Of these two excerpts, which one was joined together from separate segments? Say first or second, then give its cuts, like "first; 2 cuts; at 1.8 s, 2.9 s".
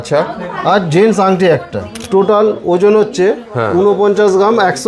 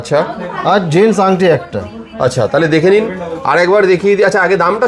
first; 1 cut; at 2.0 s